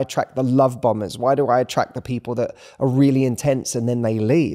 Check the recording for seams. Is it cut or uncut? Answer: uncut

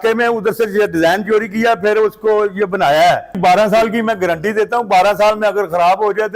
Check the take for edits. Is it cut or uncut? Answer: cut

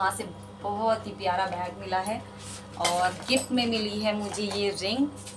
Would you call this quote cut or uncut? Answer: uncut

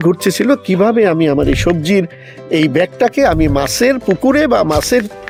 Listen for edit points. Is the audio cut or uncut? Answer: uncut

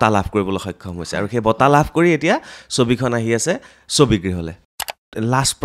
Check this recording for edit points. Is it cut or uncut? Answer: cut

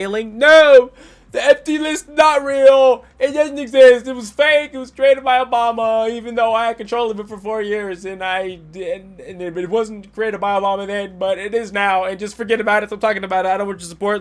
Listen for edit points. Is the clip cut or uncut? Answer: uncut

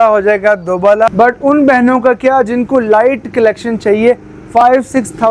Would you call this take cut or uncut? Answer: cut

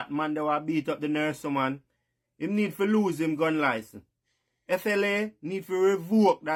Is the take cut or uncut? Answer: uncut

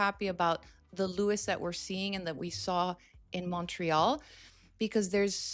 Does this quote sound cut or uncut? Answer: uncut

